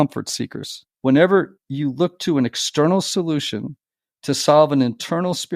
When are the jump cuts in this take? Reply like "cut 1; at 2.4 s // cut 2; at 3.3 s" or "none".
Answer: cut 1; at 0.9 s